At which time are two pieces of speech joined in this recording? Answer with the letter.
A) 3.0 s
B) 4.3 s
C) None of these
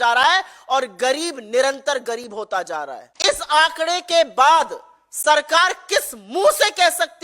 A